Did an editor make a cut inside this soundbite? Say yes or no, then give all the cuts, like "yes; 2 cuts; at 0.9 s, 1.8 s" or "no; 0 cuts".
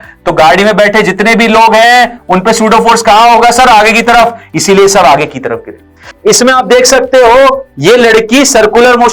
yes; 1 cut; at 6.1 s